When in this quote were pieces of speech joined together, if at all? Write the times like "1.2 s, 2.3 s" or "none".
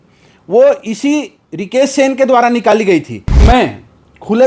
3.4 s